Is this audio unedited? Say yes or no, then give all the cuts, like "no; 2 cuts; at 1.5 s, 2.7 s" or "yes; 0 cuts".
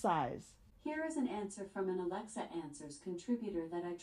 yes; 0 cuts